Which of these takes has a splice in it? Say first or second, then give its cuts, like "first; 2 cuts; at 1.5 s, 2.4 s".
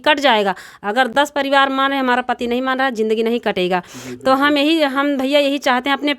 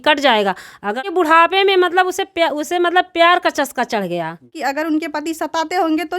second; 2 cuts; at 1.0 s, 4.5 s